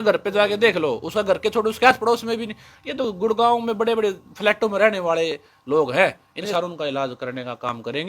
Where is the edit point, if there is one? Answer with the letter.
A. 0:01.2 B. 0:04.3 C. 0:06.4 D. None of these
C